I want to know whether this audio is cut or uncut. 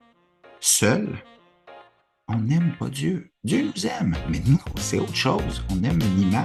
uncut